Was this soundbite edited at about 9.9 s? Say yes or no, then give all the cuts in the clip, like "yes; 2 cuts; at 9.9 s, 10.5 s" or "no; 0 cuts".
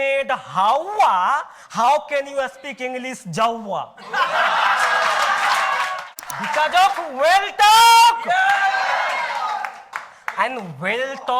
no; 1 cut; at 6.1 s